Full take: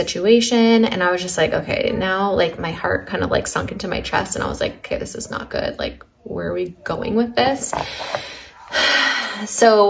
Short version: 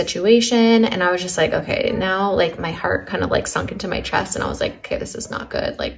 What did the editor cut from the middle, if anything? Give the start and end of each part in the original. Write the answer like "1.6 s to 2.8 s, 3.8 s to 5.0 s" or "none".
none